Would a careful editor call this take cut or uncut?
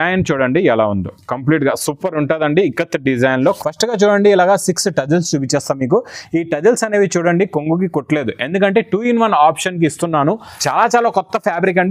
cut